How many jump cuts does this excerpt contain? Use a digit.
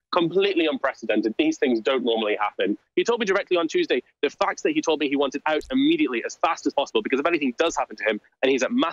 1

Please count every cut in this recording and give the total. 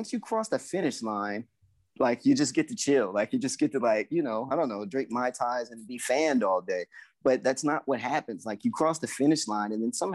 0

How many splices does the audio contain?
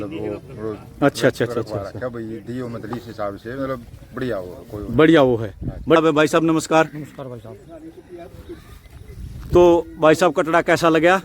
1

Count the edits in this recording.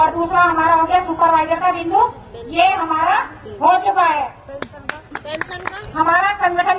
1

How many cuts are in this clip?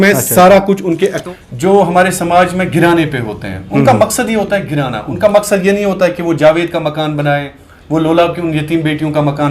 1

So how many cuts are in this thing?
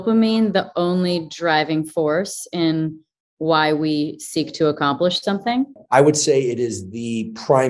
1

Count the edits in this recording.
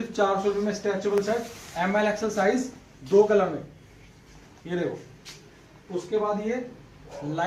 0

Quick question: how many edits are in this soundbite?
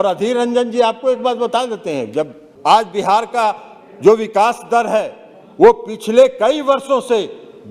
1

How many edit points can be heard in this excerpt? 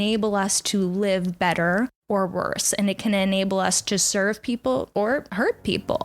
2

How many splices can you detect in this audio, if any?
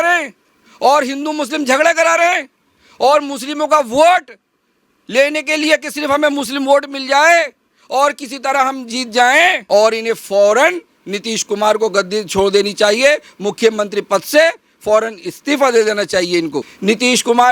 2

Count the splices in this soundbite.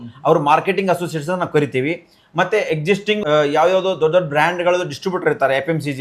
1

